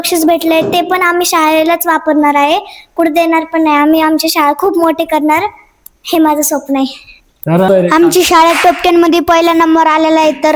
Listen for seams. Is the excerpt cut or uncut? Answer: cut